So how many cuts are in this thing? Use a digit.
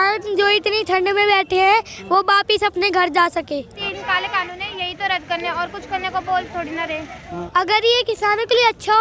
2